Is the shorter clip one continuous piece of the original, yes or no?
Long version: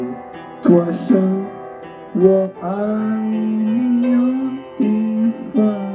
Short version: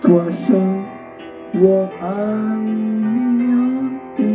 yes